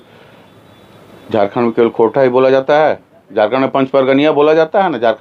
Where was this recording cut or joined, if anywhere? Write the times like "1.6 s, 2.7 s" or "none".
none

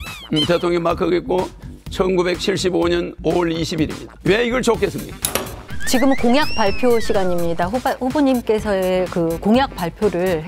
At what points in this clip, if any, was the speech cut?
none

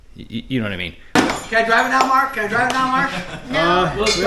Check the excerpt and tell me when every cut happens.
1.1 s

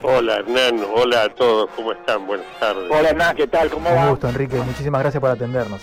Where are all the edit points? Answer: none

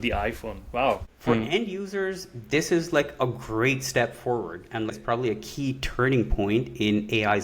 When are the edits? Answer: 1.1 s, 4.9 s

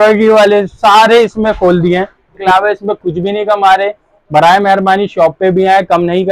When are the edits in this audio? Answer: 2.3 s

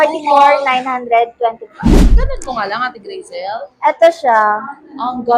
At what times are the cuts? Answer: 1.9 s

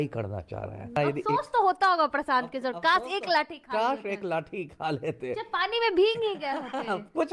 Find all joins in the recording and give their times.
1.0 s

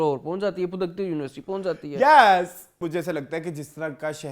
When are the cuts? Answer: 2.8 s

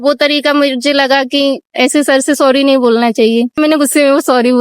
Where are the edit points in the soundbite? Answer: 3.6 s

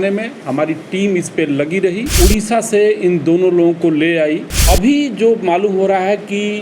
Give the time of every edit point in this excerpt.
2.1 s, 4.5 s

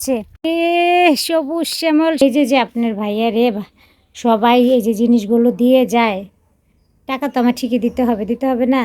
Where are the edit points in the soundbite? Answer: 2.2 s

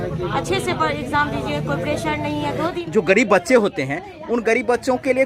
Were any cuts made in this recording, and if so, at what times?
2.8 s

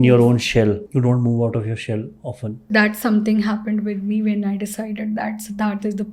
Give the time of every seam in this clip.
2.6 s

